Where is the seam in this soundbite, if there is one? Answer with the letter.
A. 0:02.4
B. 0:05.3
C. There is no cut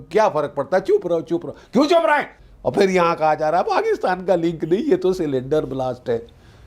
A